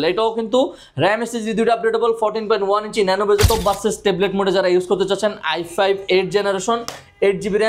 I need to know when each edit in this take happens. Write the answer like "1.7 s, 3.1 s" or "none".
3.4 s